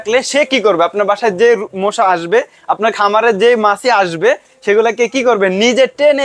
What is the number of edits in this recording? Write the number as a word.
zero